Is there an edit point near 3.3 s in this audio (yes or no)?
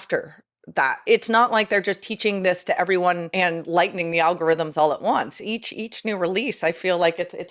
yes